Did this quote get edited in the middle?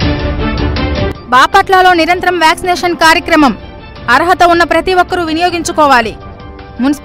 no; 0 cuts

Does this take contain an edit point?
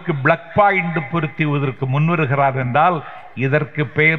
no; 0 cuts

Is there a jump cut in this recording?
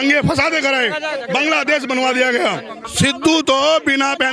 yes; 1 cut; at 2.8 s

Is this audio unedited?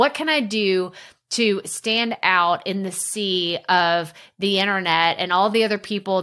yes; 0 cuts

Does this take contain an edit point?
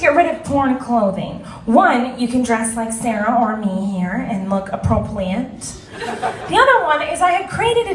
no; 0 cuts

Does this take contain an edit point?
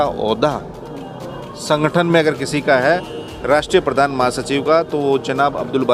no; 0 cuts

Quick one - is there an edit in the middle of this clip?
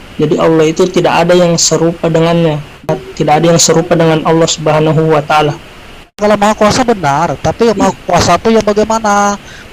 yes; 2 cuts; at 2.8 s, 6.2 s

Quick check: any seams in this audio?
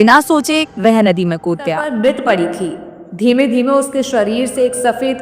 yes; 1 cut; at 1.8 s

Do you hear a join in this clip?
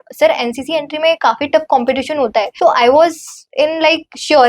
yes; 1 cut; at 2.5 s

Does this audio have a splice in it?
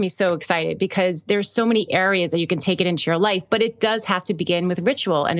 no; 0 cuts

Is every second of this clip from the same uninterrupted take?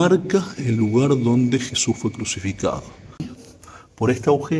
no; 1 cut; at 3.3 s

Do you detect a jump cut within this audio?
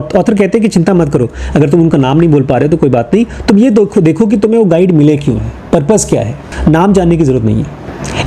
yes; 1 cut; at 6.5 s

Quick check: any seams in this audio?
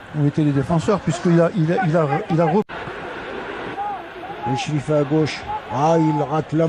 yes; 1 cut; at 2.7 s

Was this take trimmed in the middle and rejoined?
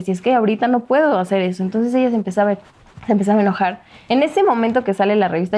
yes; 1 cut; at 3.9 s

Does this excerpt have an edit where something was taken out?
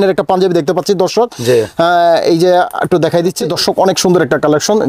yes; 1 cut; at 3.4 s

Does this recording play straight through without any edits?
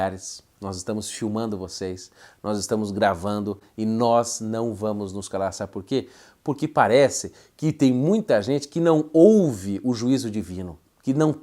yes; 0 cuts

